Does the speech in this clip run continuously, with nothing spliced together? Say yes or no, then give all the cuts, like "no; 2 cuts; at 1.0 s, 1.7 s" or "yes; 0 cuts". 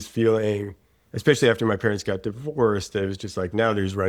yes; 0 cuts